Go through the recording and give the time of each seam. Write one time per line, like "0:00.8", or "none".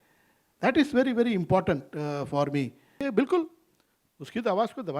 0:03.0